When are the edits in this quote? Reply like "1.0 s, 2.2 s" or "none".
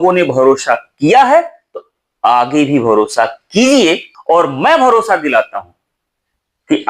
4.1 s